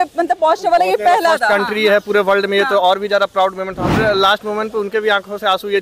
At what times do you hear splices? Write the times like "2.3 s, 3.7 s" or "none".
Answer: 4.0 s